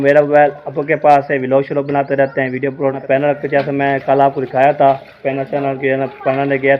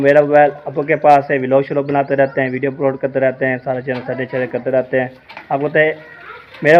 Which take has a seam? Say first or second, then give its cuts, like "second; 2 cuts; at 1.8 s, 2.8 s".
first; 1 cut; at 3.0 s